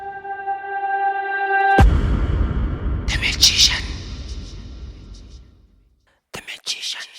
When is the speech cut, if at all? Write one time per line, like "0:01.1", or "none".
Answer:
0:05.6